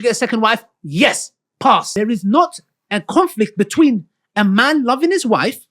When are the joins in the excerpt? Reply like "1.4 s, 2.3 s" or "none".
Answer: 1.9 s